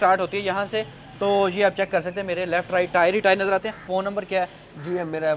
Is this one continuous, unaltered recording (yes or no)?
yes